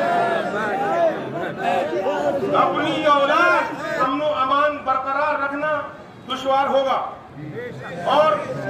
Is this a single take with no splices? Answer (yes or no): no